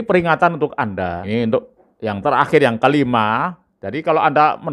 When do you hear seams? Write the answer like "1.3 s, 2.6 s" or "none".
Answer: 1.2 s